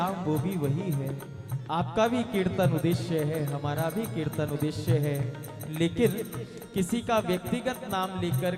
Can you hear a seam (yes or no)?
no